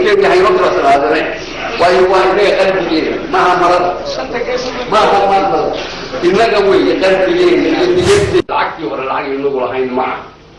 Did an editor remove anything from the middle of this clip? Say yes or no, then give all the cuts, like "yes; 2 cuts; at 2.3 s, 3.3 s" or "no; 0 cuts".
yes; 1 cut; at 8.4 s